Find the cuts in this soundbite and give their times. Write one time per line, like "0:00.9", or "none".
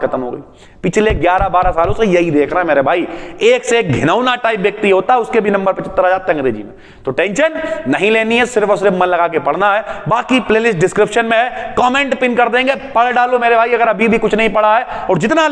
none